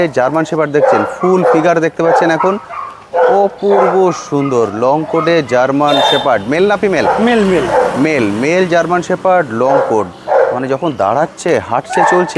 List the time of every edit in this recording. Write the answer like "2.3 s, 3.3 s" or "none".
none